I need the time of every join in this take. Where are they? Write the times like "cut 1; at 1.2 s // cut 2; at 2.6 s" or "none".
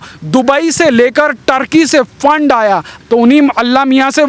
cut 1; at 2.9 s